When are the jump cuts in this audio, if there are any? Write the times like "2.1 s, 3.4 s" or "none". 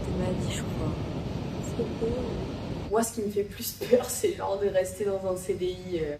2.8 s